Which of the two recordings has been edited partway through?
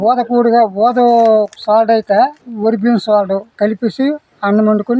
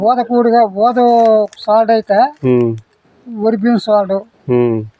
first; 2 cuts; at 2.4 s, 3.5 s

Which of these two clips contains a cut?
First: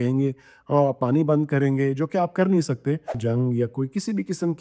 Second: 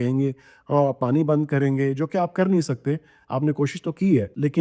first; 1 cut; at 3.2 s

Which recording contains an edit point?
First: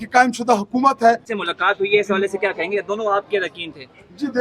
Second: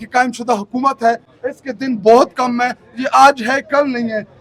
first; 1 cut; at 1.3 s

